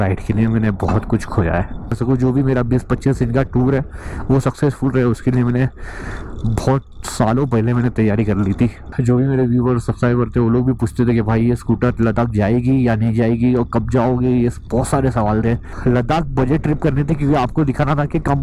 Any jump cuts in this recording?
yes; 3 cuts; at 2.0 s, 8.9 s, 15.7 s

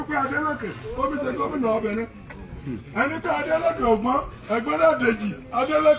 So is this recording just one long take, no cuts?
yes; 0 cuts

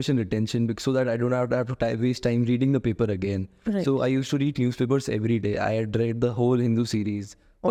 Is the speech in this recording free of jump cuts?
yes; 0 cuts

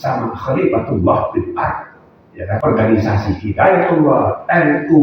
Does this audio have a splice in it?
yes; 1 cut; at 2.6 s

